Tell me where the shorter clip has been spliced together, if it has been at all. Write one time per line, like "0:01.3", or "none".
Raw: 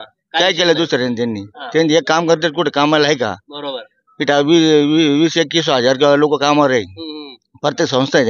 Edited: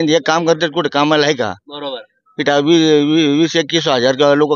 none

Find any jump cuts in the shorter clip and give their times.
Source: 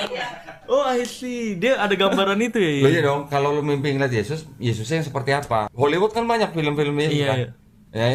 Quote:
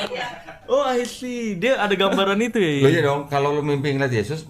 none

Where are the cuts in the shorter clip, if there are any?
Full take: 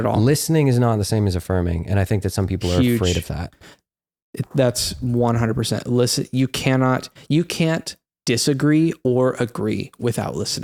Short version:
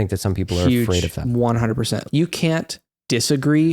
0:01.2
0:02.0

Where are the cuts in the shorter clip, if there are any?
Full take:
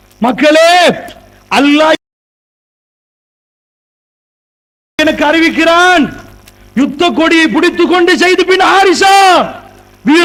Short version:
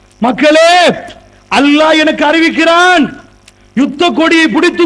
0:02.0

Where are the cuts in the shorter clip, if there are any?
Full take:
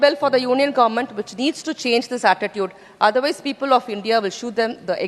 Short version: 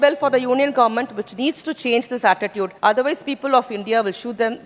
0:02.7

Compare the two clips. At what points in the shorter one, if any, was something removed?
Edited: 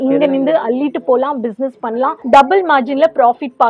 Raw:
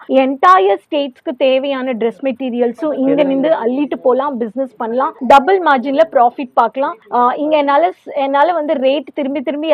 none

